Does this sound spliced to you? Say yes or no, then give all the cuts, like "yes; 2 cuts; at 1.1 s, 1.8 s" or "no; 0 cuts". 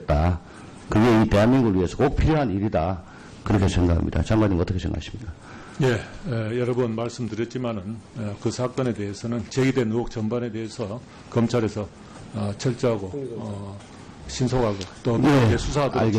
no; 0 cuts